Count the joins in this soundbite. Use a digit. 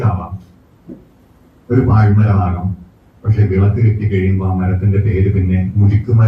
0